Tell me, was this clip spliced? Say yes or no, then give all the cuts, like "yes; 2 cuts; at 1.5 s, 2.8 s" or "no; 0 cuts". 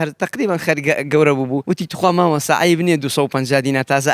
yes; 1 cut; at 1.6 s